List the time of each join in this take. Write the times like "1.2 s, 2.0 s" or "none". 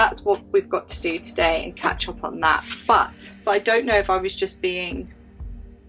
3.2 s